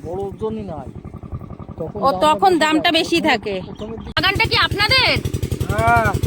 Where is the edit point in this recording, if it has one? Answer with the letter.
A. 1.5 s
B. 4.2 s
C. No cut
B